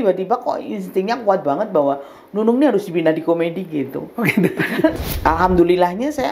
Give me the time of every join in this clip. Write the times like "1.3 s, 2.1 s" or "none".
5.1 s